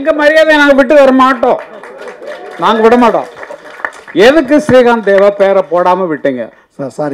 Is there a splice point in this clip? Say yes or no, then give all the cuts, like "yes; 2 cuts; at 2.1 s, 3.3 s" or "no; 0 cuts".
no; 0 cuts